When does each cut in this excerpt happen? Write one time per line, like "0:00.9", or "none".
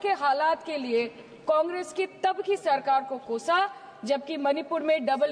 none